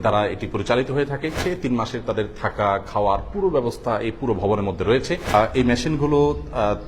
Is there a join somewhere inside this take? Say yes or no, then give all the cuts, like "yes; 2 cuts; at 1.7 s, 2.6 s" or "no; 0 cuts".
yes; 2 cuts; at 1.4 s, 5.3 s